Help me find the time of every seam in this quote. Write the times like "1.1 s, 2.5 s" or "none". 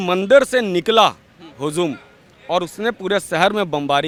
none